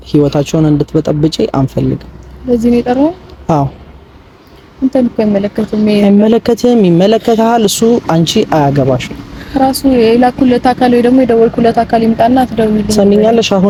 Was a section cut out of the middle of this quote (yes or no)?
no